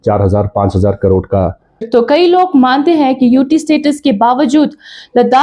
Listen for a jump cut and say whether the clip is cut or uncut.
cut